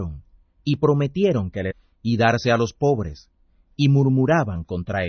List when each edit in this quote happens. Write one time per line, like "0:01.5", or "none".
none